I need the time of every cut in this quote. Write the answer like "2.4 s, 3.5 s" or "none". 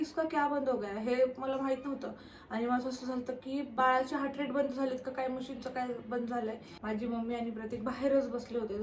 3.8 s, 6.7 s